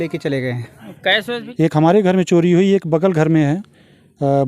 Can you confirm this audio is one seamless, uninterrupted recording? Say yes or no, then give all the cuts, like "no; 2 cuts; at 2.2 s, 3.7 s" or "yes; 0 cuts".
no; 1 cut; at 1.4 s